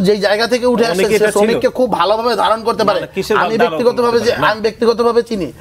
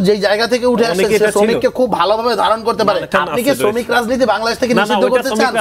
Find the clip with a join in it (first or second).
second